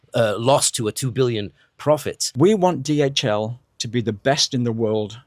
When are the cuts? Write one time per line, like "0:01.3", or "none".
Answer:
0:02.2